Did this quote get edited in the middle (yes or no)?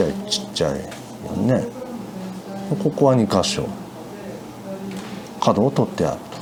no